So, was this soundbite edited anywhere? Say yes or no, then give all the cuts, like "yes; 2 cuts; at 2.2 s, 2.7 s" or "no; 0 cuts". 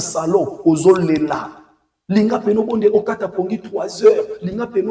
no; 0 cuts